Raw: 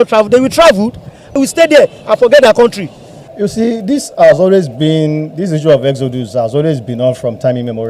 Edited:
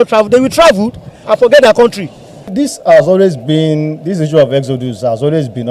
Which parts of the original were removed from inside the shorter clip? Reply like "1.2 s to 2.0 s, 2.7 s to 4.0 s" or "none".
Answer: 1.2 s to 2.0 s, 3.3 s to 3.8 s